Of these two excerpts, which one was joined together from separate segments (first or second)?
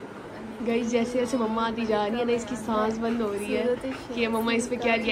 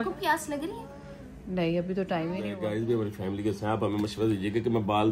second